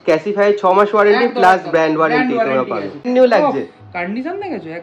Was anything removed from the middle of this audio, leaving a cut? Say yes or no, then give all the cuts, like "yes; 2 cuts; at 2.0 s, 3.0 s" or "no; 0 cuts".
yes; 1 cut; at 3.0 s